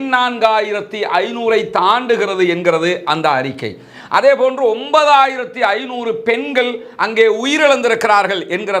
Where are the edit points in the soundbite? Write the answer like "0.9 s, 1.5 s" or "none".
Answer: none